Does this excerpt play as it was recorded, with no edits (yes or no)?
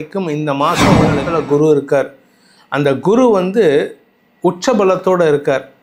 no